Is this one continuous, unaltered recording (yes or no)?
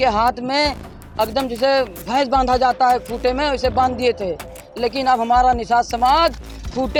yes